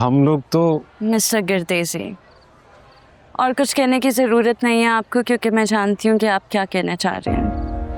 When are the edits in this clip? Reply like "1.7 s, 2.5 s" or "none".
none